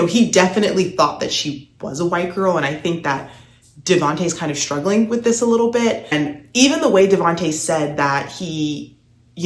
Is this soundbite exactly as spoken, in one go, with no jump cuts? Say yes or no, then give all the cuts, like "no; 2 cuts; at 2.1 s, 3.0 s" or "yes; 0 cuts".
no; 1 cut; at 6.1 s